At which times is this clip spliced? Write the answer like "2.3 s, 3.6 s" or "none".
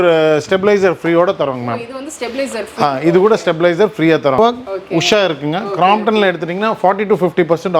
4.4 s